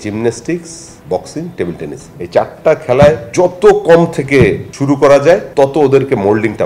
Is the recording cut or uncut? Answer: uncut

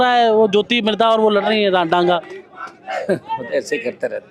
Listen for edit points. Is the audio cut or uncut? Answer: uncut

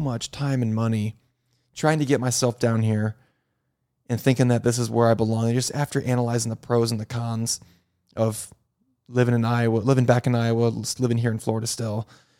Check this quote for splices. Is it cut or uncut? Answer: uncut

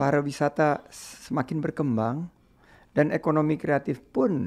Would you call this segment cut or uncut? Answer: uncut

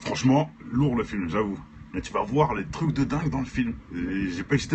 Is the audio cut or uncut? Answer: uncut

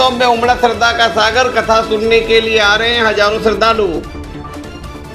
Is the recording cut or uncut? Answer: cut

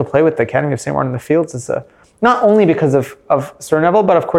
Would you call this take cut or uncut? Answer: uncut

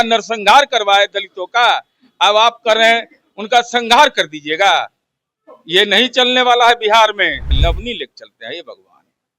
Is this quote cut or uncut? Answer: cut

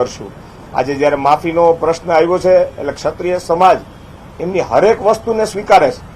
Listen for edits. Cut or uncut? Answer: cut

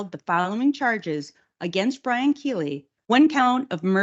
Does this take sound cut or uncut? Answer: cut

